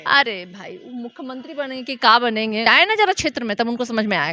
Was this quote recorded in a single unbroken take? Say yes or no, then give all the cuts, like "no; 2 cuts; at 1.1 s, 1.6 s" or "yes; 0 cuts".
no; 1 cut; at 2.7 s